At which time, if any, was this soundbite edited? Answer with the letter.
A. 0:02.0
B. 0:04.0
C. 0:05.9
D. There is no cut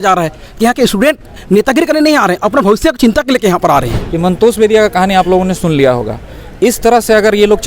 B